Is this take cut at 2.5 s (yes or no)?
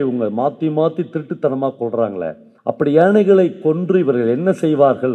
yes